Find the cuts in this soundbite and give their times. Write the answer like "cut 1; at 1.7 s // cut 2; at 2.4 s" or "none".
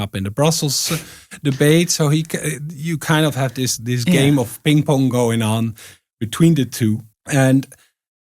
cut 1; at 7.1 s